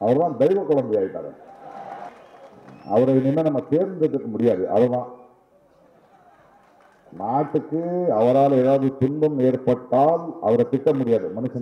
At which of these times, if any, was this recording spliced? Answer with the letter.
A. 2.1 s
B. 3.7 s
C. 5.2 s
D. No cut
A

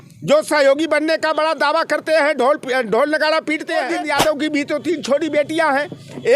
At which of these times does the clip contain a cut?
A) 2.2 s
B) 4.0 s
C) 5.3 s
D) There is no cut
B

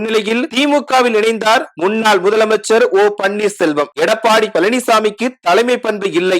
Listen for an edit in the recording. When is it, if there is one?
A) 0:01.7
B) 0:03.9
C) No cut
B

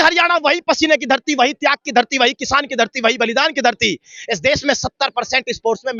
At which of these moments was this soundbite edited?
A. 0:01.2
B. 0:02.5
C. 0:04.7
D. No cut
D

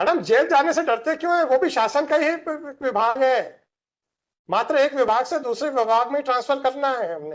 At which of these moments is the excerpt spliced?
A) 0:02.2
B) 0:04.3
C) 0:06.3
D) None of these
D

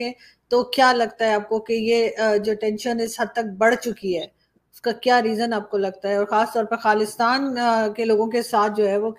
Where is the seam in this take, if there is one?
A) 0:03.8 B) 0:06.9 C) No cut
C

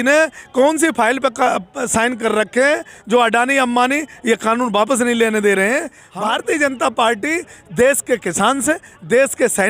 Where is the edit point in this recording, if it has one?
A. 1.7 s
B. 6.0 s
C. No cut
B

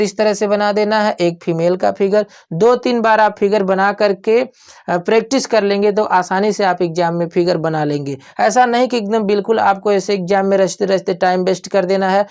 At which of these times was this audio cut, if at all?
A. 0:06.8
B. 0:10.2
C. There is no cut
C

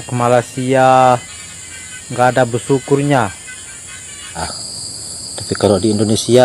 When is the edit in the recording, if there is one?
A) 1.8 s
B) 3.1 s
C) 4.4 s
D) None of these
C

